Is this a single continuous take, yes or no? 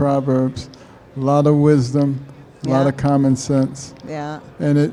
yes